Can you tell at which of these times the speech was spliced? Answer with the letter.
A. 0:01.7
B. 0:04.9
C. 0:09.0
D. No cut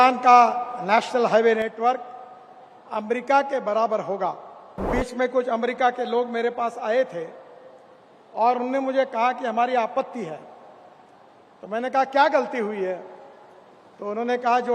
B